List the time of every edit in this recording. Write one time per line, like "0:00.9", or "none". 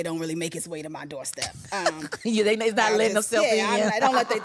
none

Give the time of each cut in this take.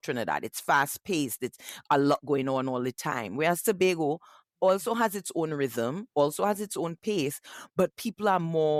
none

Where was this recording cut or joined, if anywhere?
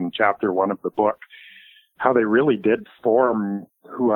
none

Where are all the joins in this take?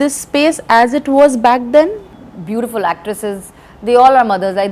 0:02.1

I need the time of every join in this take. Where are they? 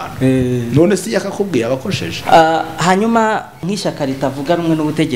0:02.2
0:03.6

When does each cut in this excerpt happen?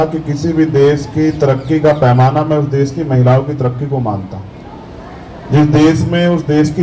none

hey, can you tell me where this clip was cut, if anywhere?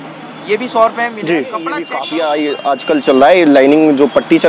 0:01.9

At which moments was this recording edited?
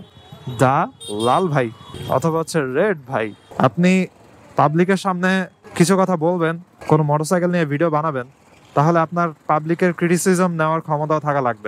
0:03.4

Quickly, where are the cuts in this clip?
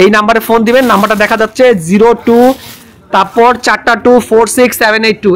none

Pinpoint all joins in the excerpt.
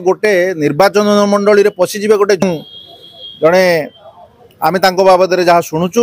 0:02.4

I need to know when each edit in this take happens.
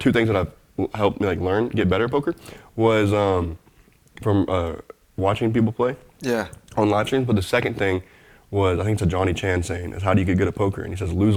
none

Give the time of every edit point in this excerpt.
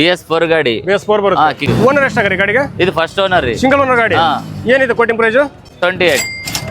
0:01.7
0:05.7

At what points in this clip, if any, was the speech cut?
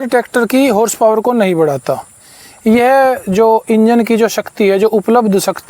none

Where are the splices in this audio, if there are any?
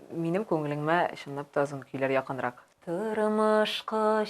0:02.7

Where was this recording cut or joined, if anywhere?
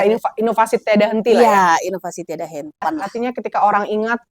0:02.8

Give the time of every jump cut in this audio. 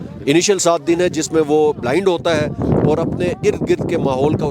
none

